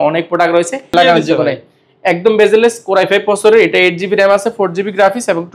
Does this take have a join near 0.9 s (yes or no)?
yes